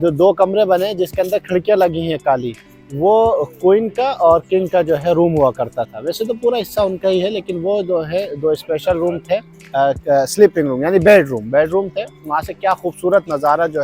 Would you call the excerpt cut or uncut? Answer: uncut